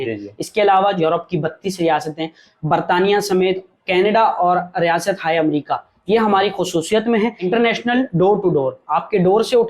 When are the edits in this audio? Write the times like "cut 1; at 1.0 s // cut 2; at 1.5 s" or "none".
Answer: cut 1; at 1.0 s // cut 2; at 7.4 s